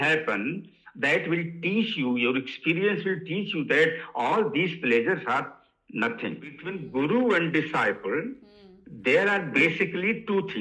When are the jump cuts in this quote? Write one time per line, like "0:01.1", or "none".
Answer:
0:06.7

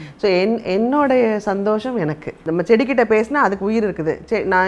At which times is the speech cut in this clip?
0:02.4

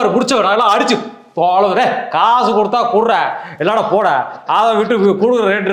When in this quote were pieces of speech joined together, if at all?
none

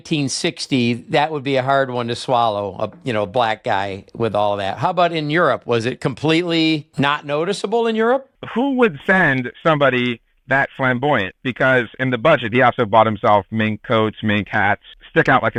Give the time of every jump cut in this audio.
none

